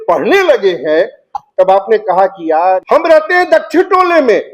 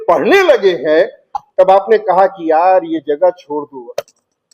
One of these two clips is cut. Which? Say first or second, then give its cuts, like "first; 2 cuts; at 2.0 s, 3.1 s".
first; 1 cut; at 2.8 s